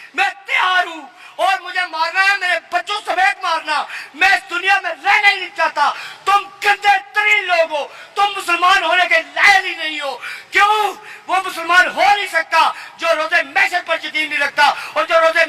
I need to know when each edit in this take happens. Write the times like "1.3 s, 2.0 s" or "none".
none